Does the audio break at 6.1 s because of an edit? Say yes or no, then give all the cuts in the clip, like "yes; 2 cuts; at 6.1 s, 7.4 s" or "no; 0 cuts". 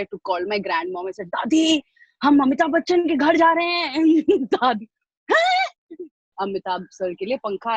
yes; 1 cut; at 6.1 s